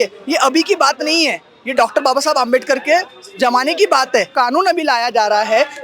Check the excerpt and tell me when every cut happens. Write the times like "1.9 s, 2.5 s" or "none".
4.3 s